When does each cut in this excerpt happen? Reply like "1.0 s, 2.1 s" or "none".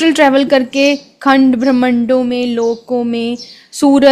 none